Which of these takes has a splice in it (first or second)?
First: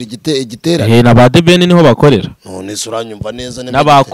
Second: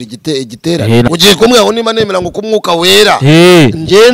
second